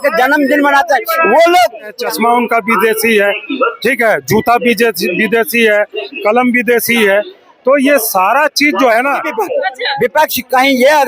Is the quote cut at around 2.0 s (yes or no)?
yes